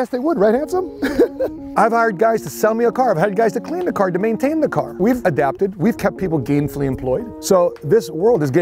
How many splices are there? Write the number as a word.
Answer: three